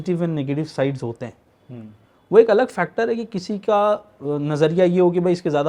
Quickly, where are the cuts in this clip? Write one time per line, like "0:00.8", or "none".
none

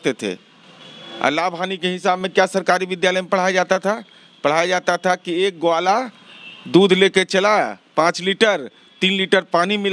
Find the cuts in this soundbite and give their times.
none

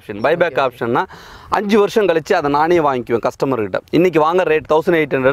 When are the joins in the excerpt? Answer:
none

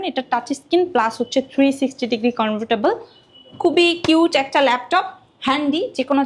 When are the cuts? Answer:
none

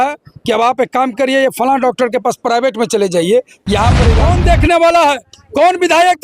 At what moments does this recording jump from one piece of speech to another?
0:04.0

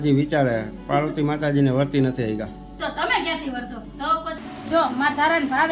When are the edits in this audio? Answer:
0:04.5

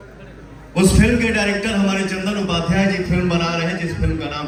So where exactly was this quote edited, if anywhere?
none

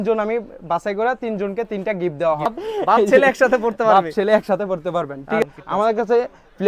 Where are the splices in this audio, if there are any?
0:02.6
0:05.4

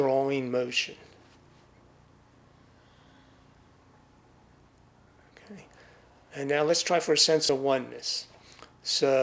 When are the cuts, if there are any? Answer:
none

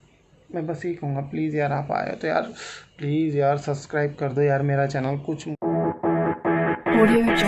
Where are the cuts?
0:05.5

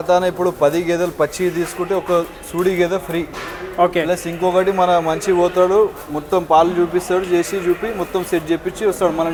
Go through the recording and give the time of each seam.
none

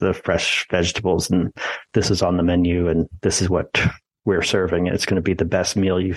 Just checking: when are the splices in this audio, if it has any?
none

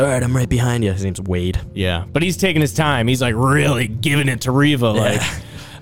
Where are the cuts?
none

